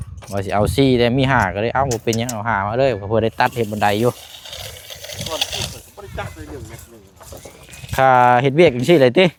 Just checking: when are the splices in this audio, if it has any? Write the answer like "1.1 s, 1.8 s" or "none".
none